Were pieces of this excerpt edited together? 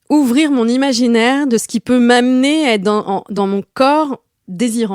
yes; 1 cut; at 3.3 s

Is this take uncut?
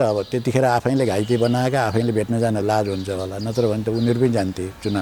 yes; 0 cuts

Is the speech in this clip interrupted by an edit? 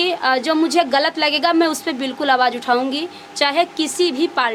no; 0 cuts

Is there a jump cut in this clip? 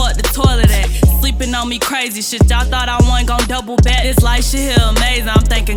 no; 0 cuts

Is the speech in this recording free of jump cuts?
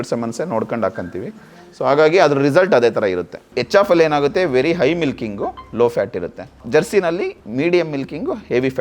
no; 3 cuts; at 3.5 s, 6.6 s, 7.4 s

